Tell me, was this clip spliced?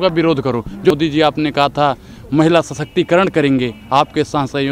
yes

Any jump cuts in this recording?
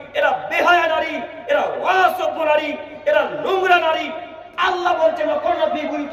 no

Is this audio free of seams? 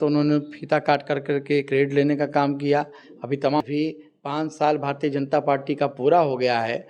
no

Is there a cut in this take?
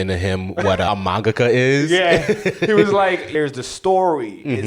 yes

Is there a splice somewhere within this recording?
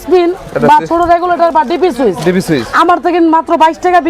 no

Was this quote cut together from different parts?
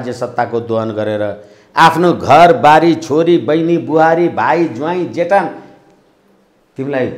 no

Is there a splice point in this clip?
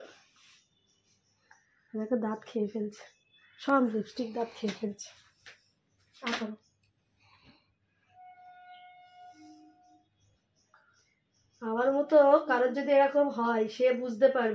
no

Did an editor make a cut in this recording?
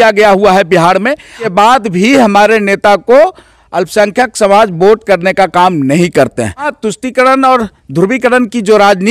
yes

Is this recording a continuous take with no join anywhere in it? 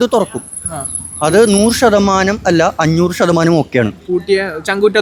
yes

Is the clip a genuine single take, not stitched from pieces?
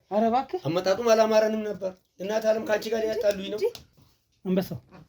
no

